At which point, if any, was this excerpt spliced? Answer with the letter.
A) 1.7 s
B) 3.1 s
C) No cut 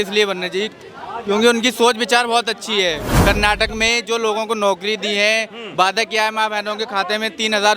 B